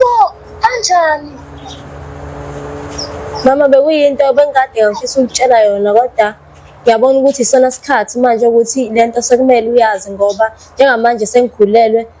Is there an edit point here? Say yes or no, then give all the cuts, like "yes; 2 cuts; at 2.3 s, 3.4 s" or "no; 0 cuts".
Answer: no; 0 cuts